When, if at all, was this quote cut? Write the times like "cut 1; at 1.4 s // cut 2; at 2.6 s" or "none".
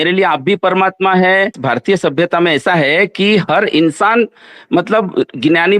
cut 1; at 1.6 s